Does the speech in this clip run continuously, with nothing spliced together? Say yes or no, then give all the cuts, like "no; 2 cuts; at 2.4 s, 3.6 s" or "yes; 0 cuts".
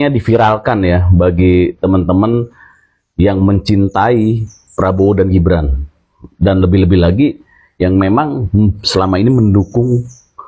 yes; 0 cuts